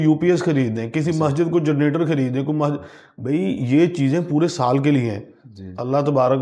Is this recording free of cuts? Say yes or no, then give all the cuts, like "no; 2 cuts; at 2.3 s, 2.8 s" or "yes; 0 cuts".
yes; 0 cuts